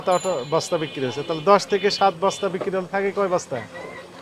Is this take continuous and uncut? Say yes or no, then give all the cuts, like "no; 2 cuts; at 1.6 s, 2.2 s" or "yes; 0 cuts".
yes; 0 cuts